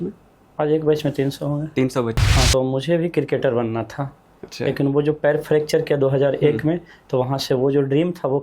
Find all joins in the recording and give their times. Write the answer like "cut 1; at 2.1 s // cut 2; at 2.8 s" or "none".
cut 1; at 2.5 s